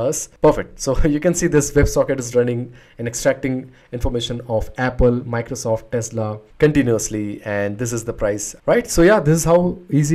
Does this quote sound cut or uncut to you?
cut